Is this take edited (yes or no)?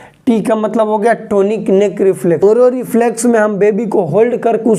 yes